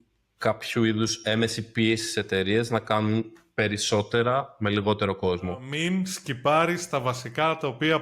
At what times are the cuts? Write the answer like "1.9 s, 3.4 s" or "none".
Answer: 5.7 s